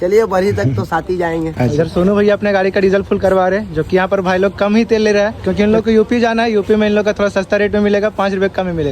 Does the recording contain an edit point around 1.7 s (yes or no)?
yes